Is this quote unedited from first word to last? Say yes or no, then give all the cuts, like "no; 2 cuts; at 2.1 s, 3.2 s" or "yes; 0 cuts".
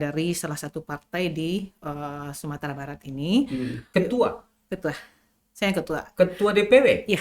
no; 1 cut; at 3.8 s